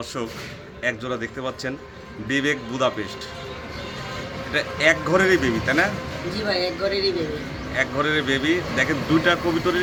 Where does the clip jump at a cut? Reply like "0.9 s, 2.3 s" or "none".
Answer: none